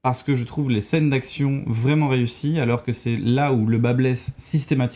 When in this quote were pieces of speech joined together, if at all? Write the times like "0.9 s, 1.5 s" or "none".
none

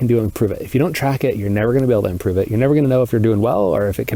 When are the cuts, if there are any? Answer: none

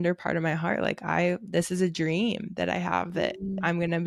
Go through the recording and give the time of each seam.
none

